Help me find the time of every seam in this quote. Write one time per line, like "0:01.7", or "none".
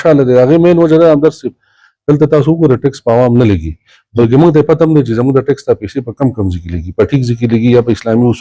none